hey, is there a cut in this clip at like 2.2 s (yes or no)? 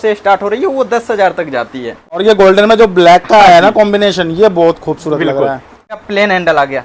yes